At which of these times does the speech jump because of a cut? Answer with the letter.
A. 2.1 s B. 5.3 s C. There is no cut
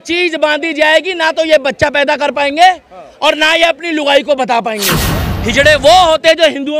B